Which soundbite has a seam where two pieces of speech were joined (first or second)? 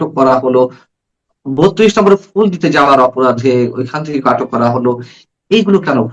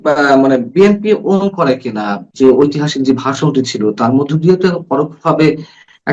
second